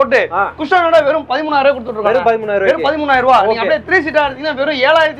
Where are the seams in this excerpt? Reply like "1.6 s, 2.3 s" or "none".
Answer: none